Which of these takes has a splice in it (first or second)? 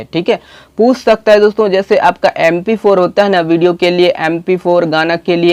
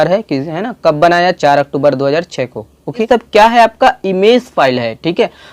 second